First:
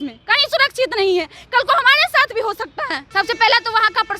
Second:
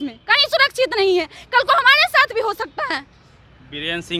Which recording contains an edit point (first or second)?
first